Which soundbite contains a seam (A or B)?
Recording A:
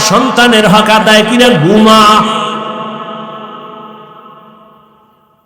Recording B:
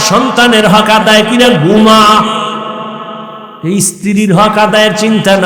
B